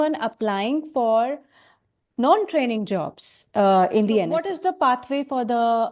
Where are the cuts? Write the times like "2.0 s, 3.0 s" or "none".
4.5 s